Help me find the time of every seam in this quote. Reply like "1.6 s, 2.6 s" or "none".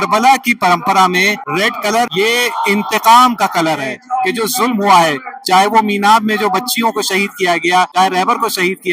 1.7 s, 4.0 s, 7.9 s